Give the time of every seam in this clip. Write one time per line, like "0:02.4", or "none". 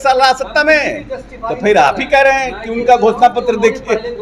none